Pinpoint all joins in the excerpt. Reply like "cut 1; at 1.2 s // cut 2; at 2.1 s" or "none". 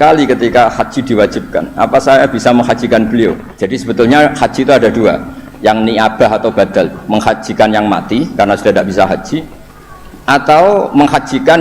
cut 1; at 3.6 s